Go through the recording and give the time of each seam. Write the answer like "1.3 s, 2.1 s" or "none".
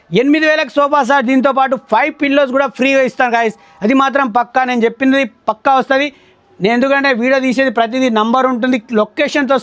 none